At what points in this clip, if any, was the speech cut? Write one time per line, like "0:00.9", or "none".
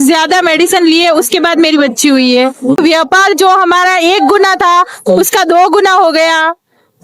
0:02.8